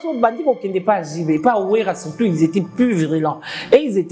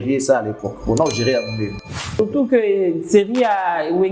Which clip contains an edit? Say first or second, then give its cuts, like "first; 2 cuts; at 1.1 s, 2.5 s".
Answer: second; 1 cut; at 1.9 s